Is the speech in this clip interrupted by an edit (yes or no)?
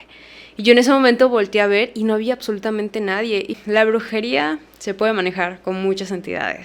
yes